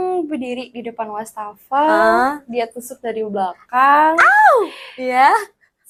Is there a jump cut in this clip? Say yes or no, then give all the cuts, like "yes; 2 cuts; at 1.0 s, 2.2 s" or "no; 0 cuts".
no; 0 cuts